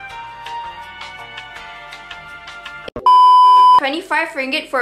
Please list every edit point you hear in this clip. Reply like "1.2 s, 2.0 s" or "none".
3.8 s